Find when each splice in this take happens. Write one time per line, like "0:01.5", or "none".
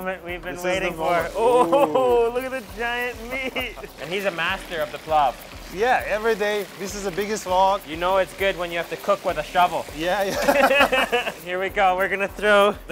0:03.9
0:07.9
0:11.4

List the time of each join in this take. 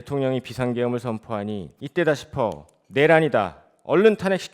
0:01.7

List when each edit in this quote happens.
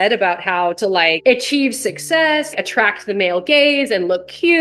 0:01.2
0:02.5

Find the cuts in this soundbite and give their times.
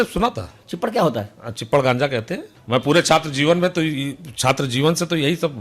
0:02.5

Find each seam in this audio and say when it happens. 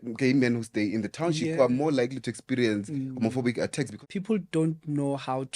0:04.0

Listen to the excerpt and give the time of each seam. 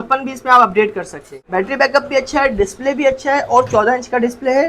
0:01.3

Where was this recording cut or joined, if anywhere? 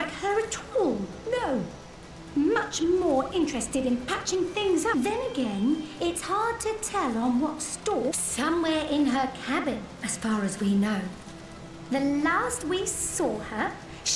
0:04.9
0:08.2

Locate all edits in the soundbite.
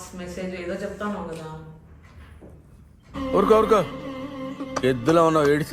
0:03.1

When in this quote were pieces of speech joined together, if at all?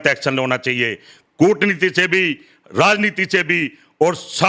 none

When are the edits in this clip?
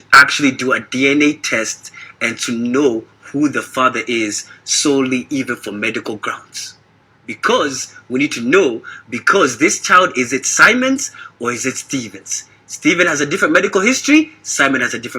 none

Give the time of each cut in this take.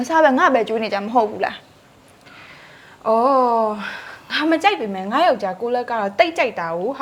none

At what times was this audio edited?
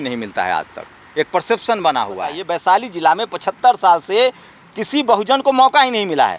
0:02.4

